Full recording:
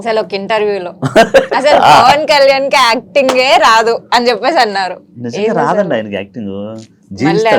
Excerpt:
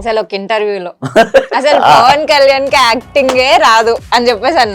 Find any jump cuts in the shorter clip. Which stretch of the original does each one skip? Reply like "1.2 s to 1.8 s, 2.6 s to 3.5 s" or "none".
none